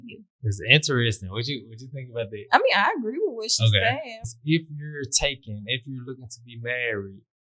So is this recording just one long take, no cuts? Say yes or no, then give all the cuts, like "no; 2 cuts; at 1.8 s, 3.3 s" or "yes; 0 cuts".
no; 1 cut; at 4.3 s